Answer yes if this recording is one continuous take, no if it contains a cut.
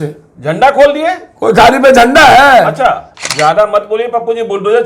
no